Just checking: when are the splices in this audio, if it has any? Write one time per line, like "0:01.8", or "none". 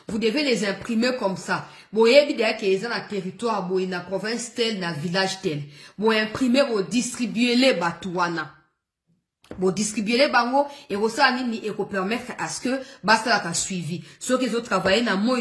none